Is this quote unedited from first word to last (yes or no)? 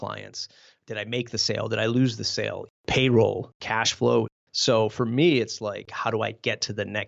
no